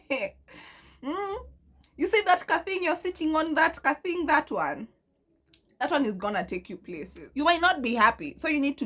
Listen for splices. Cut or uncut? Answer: cut